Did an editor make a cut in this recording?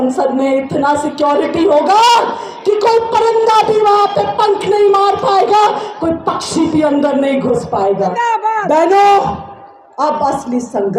yes; 1 cut; at 8.1 s

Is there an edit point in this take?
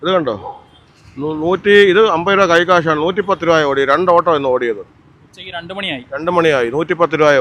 no; 0 cuts

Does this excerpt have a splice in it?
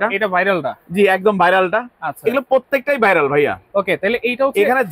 no; 0 cuts

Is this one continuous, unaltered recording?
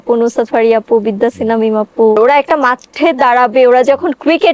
no; 1 cut; at 2.2 s

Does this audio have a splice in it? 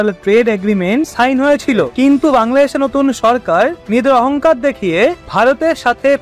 yes; 1 cut; at 1.9 s

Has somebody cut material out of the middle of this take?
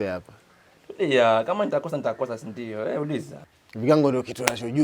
yes; 1 cut; at 3.4 s

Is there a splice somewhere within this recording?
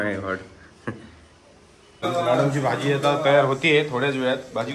yes; 1 cut; at 1.7 s

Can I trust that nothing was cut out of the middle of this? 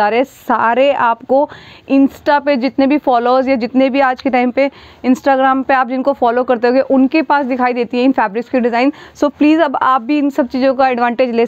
yes; 0 cuts

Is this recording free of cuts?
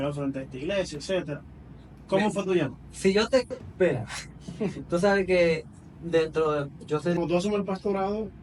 no; 1 cut; at 7.2 s

